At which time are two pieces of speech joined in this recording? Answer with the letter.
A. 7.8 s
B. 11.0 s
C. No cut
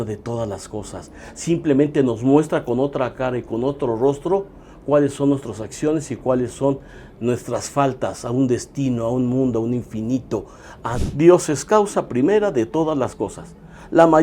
B